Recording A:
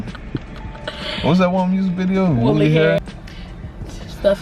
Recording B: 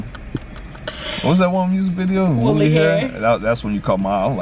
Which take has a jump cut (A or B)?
A